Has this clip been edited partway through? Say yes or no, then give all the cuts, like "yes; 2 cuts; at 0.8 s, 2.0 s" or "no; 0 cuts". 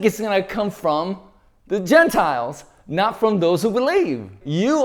no; 0 cuts